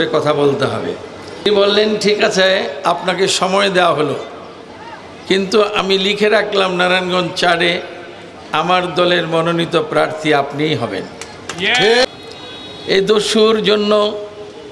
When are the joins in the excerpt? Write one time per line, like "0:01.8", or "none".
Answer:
0:01.4
0:12.0